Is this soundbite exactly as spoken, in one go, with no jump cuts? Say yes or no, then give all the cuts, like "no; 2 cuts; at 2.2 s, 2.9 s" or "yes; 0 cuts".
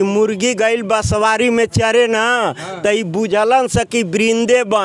yes; 0 cuts